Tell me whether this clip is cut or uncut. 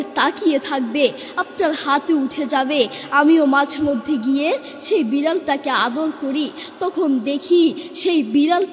uncut